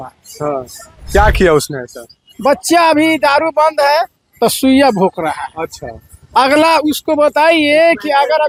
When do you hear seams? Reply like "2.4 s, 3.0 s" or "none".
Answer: none